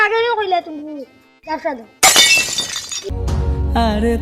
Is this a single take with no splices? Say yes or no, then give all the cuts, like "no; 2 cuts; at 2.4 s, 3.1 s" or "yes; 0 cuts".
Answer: no; 1 cut; at 3.1 s